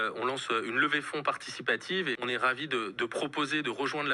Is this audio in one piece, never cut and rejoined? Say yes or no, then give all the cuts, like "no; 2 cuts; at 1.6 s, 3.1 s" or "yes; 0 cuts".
no; 1 cut; at 2.2 s